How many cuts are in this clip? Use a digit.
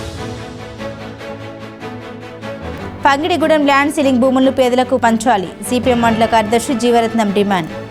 0